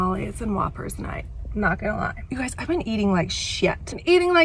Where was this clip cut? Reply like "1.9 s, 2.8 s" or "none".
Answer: none